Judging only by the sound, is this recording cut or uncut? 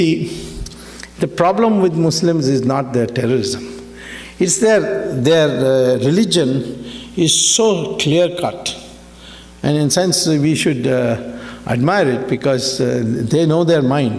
cut